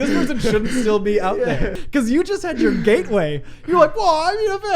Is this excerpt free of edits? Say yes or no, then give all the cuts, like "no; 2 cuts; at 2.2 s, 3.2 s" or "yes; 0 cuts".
no; 1 cut; at 1.8 s